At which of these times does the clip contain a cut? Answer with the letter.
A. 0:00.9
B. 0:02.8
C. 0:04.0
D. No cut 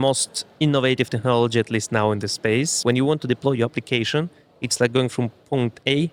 B